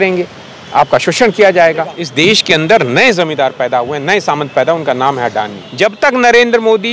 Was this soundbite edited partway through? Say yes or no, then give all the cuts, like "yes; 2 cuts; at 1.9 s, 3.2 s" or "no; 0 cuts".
yes; 2 cuts; at 2.0 s, 5.6 s